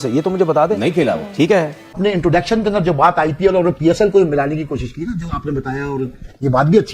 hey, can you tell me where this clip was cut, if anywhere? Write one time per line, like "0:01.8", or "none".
0:01.8